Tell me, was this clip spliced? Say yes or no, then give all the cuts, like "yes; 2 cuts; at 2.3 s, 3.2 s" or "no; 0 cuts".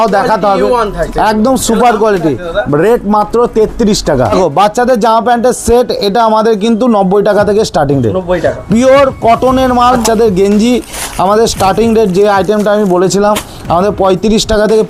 yes; 2 cuts; at 4.3 s, 10.0 s